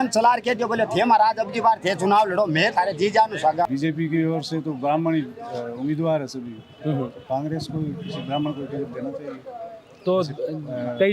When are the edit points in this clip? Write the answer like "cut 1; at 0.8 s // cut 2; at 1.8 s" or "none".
cut 1; at 3.6 s